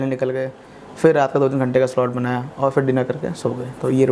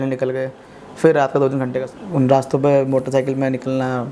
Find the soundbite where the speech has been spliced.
second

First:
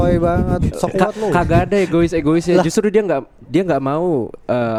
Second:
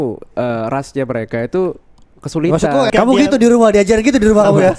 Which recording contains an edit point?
second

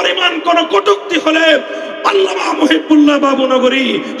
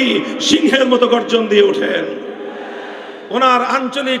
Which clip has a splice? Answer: second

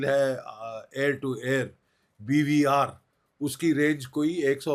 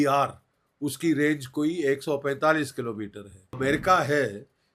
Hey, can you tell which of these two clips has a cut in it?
second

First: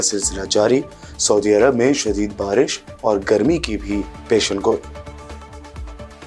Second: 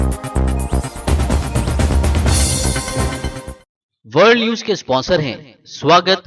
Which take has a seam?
second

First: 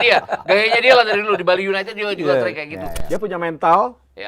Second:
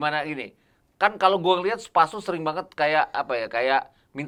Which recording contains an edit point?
first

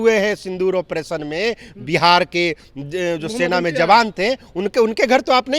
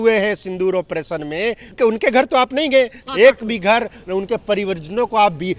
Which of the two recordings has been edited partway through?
second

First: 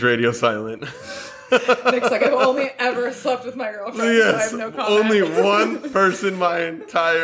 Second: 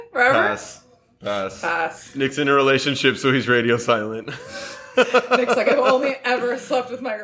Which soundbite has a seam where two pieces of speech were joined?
second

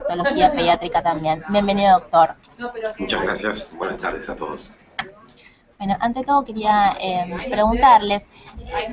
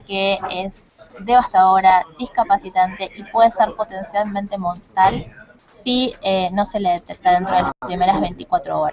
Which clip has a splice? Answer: second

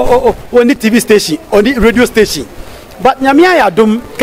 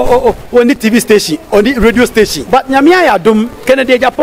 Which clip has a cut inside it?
second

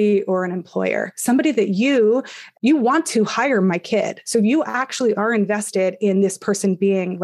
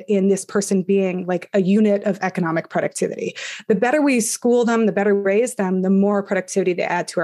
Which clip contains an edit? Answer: first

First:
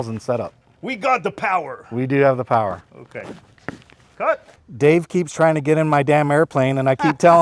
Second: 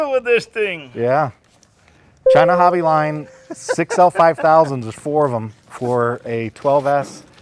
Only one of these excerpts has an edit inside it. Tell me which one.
first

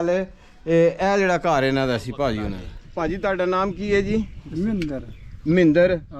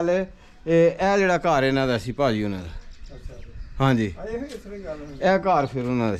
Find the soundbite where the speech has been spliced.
first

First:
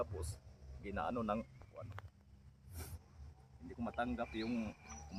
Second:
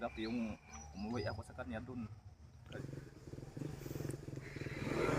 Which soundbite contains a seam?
second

